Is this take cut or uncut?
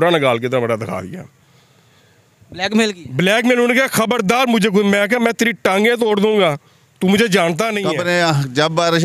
cut